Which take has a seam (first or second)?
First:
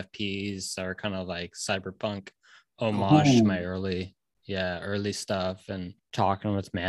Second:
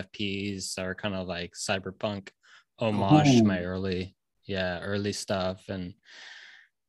first